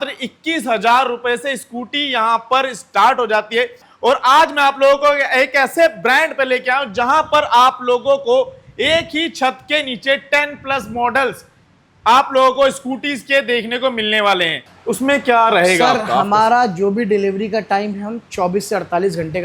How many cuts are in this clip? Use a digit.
2